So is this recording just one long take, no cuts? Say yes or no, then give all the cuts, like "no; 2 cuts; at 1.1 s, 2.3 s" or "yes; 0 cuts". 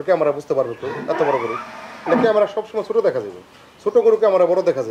yes; 0 cuts